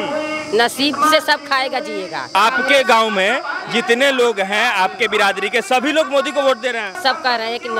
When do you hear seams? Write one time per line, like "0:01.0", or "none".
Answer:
0:02.3
0:06.9